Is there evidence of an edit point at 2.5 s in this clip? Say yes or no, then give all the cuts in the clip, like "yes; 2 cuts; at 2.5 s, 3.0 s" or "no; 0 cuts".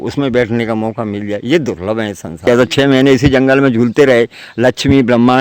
yes; 1 cut; at 2.5 s